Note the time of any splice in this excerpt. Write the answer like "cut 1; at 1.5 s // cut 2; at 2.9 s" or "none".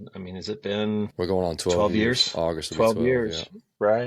cut 1; at 1.1 s